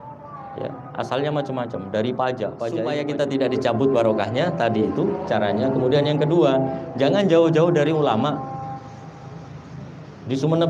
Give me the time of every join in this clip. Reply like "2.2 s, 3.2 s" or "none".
2.8 s